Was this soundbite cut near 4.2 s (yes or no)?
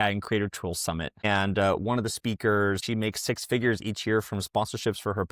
no